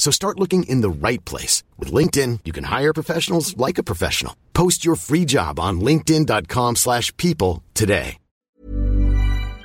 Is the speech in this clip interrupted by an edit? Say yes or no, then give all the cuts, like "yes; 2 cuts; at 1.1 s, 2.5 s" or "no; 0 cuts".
yes; 1 cut; at 8.3 s